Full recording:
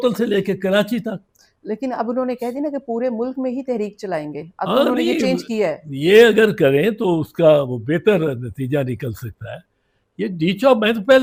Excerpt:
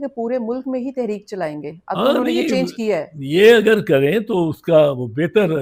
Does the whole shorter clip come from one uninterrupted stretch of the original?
yes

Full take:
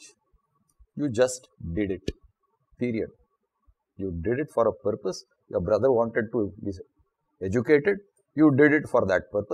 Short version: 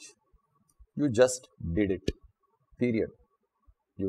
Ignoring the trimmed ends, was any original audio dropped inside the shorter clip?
no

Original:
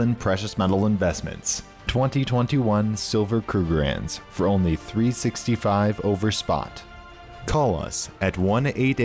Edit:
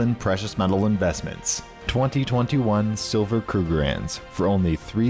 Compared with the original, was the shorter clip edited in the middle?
no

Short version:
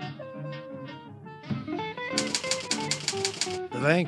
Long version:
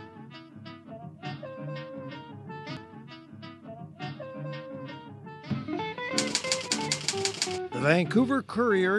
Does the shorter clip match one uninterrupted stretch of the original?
no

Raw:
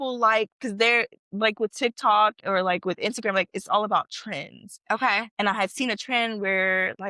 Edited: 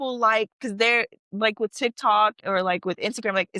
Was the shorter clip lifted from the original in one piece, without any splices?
yes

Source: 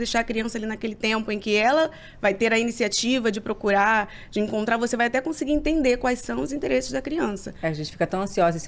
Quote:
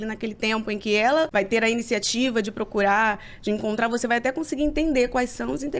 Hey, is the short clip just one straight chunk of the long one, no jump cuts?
no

